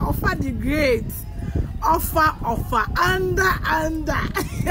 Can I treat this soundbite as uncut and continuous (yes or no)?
yes